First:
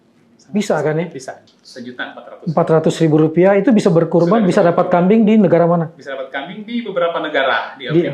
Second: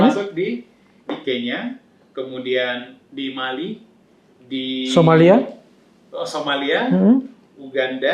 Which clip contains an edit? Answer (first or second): first